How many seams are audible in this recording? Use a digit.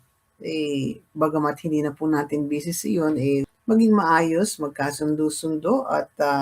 1